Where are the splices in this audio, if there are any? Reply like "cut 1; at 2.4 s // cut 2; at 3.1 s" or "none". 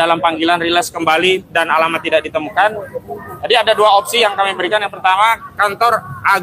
none